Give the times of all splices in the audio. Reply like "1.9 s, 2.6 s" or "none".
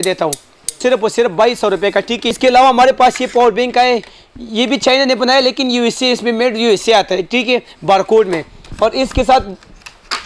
0.8 s, 2.2 s